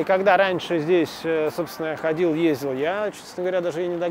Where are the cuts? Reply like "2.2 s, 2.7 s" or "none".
none